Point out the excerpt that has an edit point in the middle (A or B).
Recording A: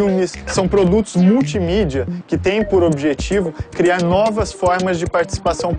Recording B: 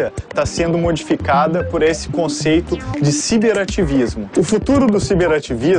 B